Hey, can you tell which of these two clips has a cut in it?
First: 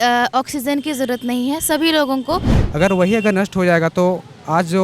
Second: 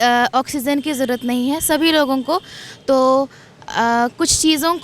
first; 1 cut; at 2.6 s

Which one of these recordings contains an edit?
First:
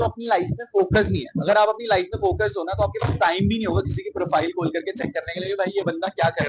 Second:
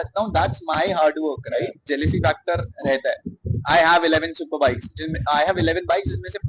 second; 1 cut; at 1.8 s

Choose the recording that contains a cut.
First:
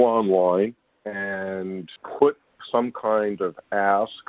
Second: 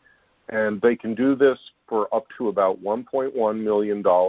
first; 2 cuts; at 1.9 s, 2.6 s

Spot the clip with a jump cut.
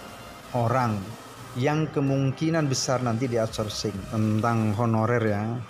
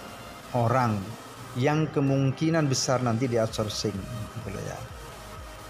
first; 1 cut; at 4.0 s

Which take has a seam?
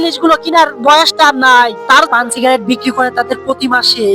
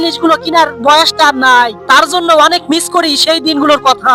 first; 1 cut; at 2.1 s

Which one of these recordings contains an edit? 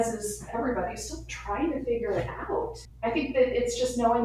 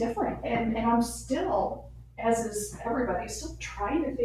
first; 1 cut; at 2.8 s

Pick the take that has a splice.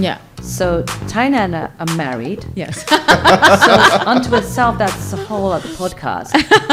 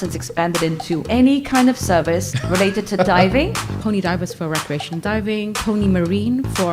second; 4 cuts; at 1.0 s, 2.4 s, 3.7 s, 5.6 s

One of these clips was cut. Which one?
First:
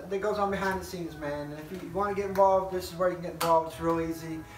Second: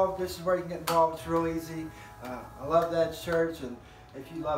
second; 1 cut; at 3.5 s

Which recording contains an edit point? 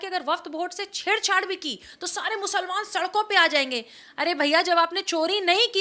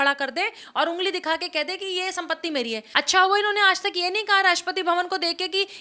second; 1 cut; at 2.9 s

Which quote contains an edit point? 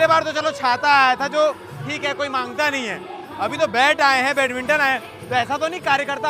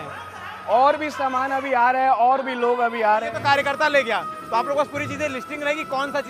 second; 1 cut; at 3.3 s

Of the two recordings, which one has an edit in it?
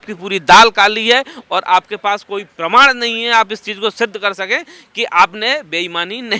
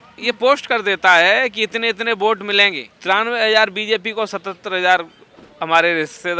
second; 1 cut; at 2.9 s

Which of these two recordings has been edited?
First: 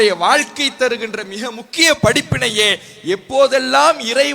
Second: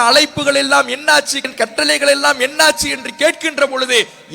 second; 1 cut; at 1.4 s

